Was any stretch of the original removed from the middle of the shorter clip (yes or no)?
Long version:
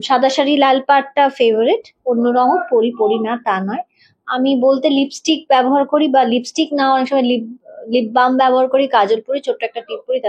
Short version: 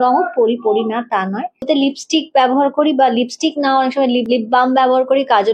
yes